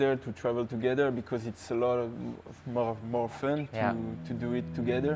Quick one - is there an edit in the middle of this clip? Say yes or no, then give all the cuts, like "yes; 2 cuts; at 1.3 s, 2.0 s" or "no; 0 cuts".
no; 0 cuts